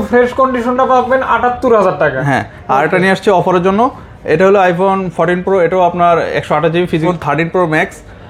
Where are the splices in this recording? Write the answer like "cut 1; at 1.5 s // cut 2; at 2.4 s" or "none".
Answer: cut 1; at 7.0 s